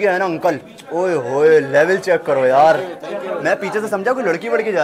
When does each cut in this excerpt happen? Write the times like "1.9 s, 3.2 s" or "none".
none